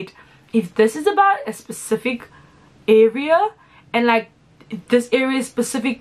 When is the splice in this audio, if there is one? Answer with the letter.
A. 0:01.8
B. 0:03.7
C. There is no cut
C